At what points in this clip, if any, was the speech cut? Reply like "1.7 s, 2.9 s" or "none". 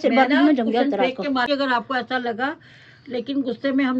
1.5 s